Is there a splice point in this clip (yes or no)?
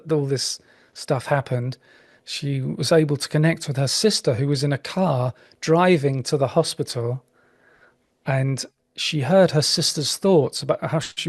no